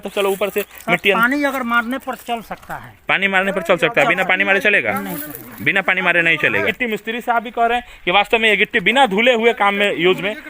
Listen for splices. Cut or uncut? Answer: cut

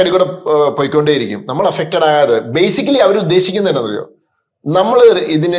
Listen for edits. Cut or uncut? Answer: uncut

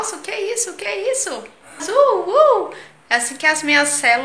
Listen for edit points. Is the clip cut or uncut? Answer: cut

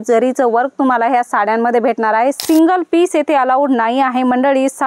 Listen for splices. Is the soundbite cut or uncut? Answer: cut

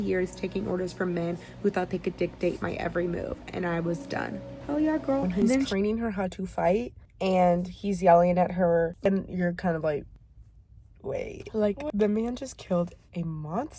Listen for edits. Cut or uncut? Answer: cut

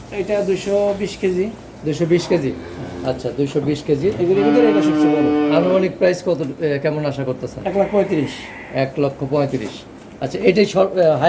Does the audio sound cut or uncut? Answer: uncut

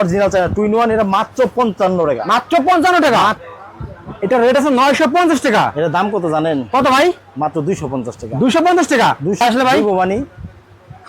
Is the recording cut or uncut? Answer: cut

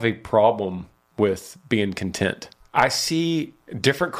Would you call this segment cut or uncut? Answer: cut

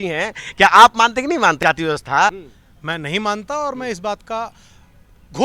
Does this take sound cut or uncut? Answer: cut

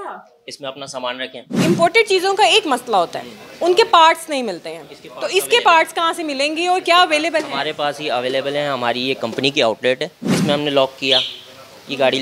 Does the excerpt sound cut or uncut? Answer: cut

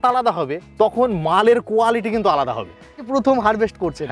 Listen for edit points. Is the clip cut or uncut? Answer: cut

